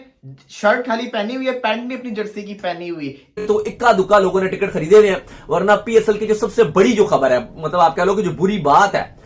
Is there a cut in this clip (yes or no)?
yes